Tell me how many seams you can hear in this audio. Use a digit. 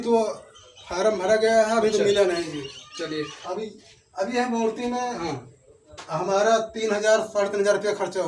1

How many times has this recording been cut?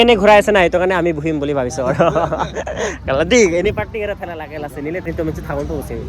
1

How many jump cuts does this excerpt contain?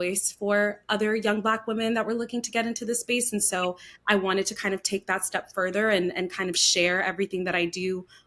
0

